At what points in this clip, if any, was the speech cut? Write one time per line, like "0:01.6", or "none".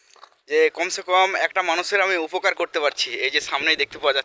none